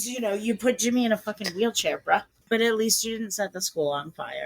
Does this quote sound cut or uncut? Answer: cut